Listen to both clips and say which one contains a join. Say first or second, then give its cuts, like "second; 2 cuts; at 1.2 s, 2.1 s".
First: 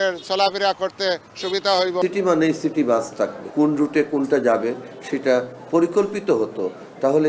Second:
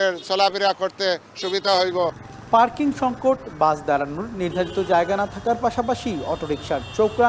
first; 2 cuts; at 2.0 s, 3.4 s